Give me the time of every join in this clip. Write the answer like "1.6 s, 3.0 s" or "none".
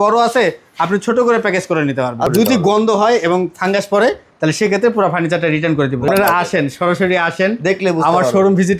2.3 s, 6.1 s